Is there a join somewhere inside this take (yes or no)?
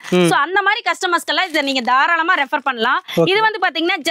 no